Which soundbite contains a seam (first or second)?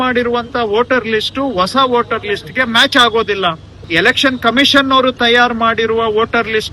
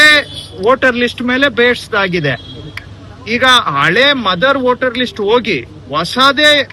first